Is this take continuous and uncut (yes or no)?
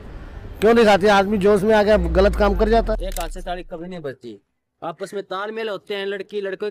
yes